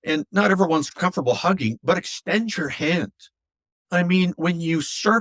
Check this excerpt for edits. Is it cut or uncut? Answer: cut